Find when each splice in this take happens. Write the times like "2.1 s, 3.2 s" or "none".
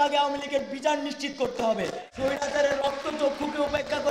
2.0 s